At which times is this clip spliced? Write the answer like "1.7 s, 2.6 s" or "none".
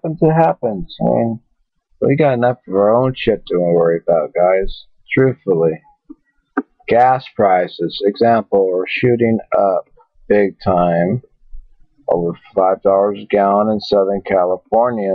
1.7 s